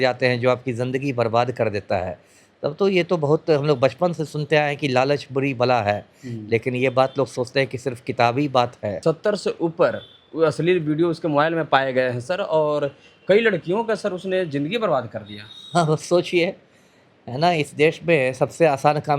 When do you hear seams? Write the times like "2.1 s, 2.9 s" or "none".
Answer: 9.0 s